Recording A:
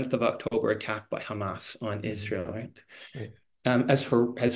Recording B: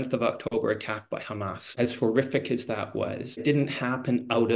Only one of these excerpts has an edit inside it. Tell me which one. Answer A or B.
B